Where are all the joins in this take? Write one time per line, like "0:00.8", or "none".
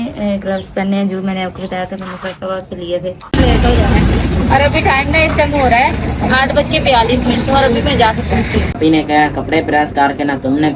0:03.3
0:08.8